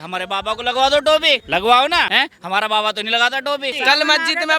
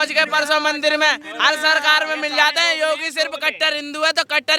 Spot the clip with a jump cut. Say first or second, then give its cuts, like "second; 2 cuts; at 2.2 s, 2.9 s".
first; 3 cuts; at 1.4 s, 2.1 s, 3.8 s